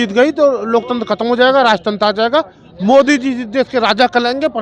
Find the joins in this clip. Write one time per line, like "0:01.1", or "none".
none